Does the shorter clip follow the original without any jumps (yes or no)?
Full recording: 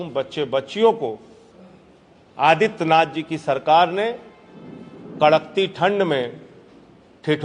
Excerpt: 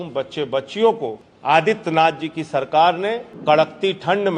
no